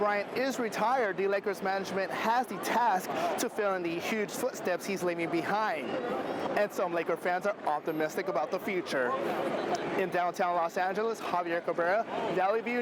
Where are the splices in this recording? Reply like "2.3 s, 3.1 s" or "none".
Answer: none